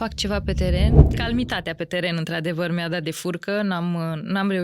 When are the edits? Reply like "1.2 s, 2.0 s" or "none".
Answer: 1.0 s